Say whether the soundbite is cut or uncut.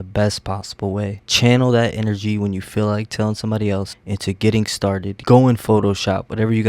cut